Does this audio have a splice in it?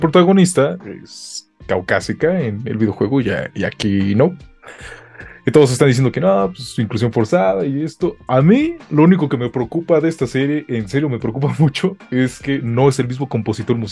no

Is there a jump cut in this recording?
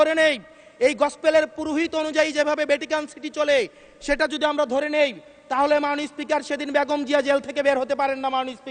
no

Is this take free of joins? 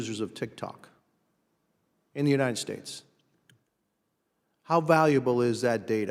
yes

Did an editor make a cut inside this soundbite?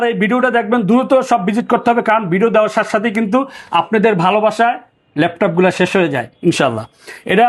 no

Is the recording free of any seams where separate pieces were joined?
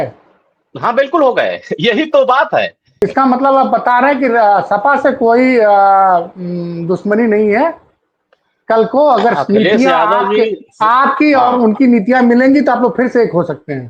no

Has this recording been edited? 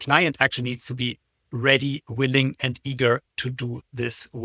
no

